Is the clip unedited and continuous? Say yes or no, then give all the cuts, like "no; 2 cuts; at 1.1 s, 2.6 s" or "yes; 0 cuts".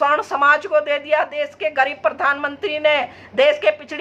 yes; 0 cuts